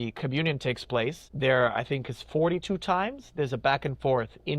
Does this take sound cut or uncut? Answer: cut